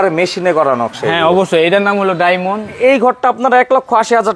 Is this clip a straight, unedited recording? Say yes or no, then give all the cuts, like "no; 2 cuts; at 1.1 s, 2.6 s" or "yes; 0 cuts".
no; 1 cut; at 2.7 s